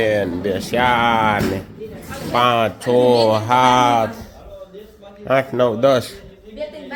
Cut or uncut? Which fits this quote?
uncut